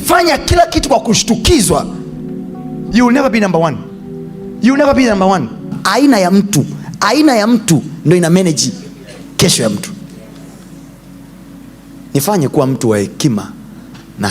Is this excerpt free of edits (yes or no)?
no